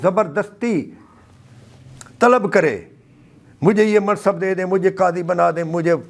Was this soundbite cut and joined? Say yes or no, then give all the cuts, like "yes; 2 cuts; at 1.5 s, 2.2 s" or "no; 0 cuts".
no; 0 cuts